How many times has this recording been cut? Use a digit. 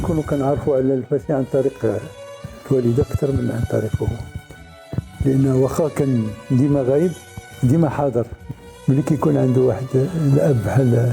1